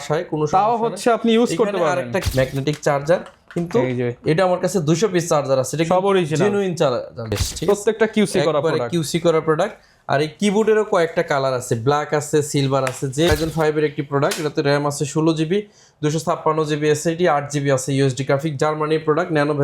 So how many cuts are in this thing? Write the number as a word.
three